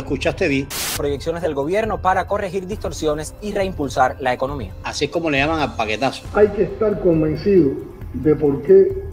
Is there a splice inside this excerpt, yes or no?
yes